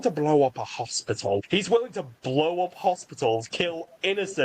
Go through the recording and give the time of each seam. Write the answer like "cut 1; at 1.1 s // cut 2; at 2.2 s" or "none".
cut 1; at 1.4 s